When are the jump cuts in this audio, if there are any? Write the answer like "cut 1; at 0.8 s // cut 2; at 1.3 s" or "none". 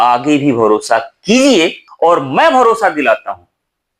cut 1; at 1.8 s